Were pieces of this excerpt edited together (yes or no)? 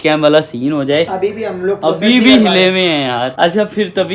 no